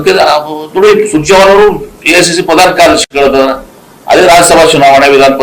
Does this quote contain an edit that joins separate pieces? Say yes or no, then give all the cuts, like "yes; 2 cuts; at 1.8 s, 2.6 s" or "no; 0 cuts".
yes; 1 cut; at 2.8 s